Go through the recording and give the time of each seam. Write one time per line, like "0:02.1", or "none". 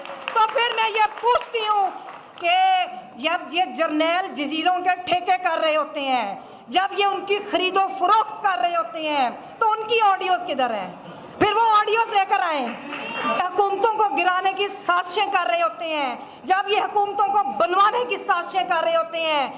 0:13.4